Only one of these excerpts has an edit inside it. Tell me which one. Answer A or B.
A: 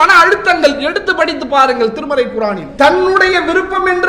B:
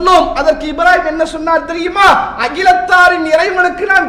A